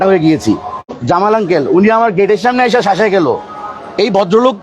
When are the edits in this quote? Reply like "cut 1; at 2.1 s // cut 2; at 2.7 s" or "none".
cut 1; at 0.9 s

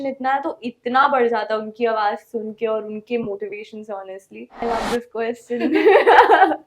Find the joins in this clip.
cut 1; at 4.6 s

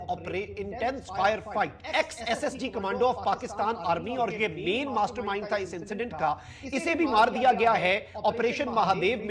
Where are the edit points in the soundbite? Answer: cut 1; at 1.8 s

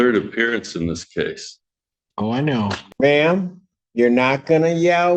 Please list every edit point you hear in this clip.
cut 1; at 2.9 s

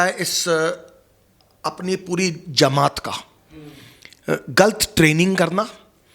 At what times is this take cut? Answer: none

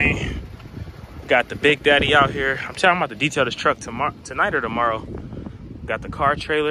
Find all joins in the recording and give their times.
none

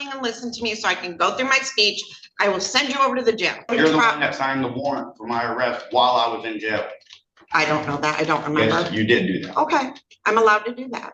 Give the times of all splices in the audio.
cut 1; at 3.7 s

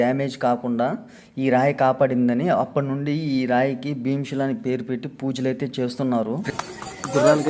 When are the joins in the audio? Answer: cut 1; at 6.4 s

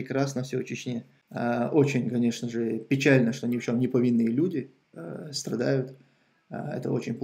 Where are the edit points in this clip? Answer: cut 1; at 1.2 s

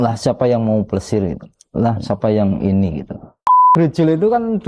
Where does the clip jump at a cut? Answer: cut 1; at 3.7 s

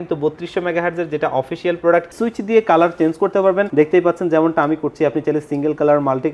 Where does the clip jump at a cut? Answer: cut 1; at 2.1 s // cut 2; at 3.7 s

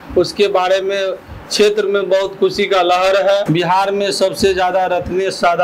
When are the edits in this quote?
cut 1; at 3.4 s

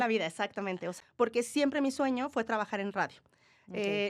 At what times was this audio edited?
cut 1; at 0.9 s

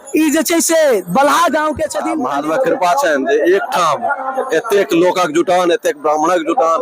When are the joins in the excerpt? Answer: cut 1; at 2.0 s

